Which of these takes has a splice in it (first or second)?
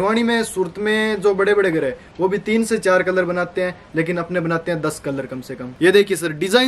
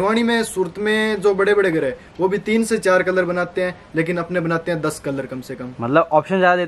first